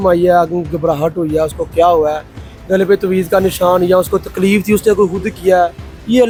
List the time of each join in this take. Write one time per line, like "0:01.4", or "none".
none